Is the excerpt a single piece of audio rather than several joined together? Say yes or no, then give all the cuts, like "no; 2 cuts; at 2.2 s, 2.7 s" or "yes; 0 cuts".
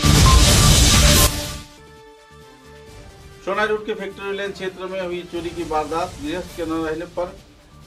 no; 2 cuts; at 1.3 s, 3.0 s